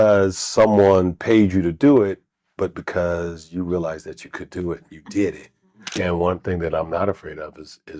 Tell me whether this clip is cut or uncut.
cut